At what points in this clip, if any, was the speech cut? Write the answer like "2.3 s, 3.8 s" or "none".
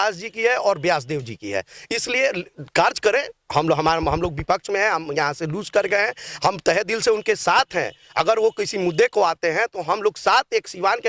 none